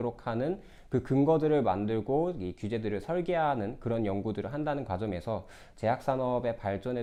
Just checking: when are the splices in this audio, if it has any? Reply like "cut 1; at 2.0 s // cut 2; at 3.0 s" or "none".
none